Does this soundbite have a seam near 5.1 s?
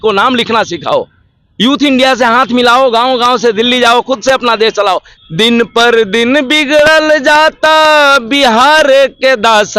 yes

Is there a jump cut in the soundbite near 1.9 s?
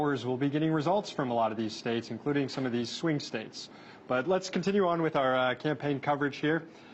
yes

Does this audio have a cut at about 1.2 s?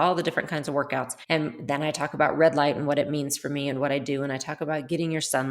yes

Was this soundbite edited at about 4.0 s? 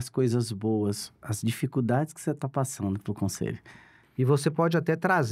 yes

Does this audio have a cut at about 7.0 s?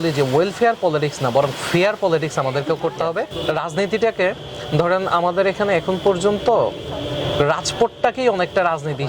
no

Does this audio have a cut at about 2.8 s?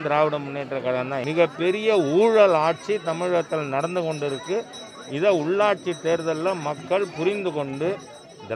no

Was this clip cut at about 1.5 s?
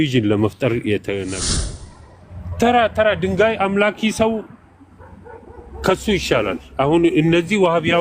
yes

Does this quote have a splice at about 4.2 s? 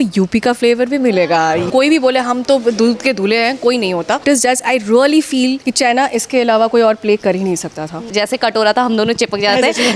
yes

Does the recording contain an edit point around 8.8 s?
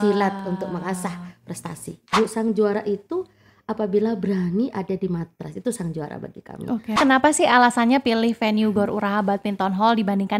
no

